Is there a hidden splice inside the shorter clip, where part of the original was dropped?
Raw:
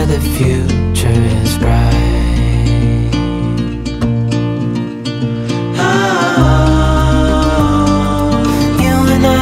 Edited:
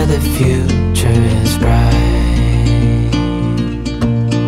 no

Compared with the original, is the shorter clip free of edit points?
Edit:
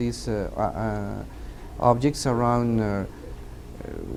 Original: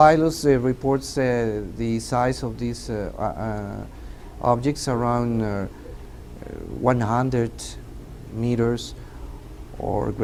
yes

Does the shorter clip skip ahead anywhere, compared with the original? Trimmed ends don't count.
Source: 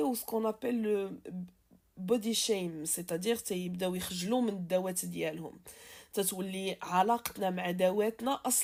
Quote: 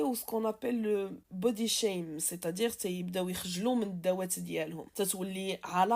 yes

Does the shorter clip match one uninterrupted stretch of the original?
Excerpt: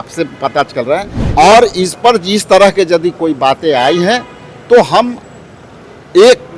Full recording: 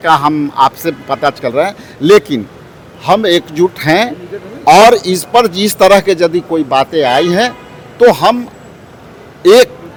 no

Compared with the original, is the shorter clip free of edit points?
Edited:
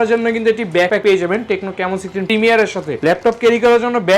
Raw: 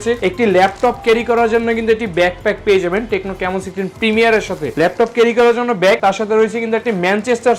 no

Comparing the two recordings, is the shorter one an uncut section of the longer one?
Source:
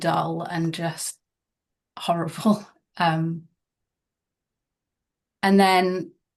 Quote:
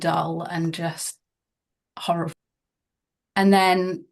no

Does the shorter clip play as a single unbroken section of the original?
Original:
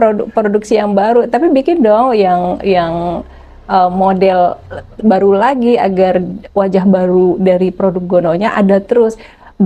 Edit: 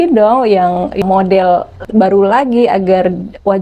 no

